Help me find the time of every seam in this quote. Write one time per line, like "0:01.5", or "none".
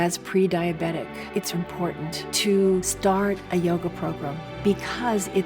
0:01.5